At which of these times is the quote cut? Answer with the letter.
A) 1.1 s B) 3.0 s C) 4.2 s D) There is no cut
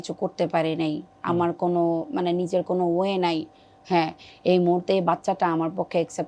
D